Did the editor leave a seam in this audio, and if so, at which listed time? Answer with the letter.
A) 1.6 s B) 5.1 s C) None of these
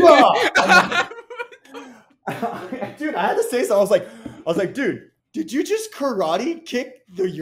B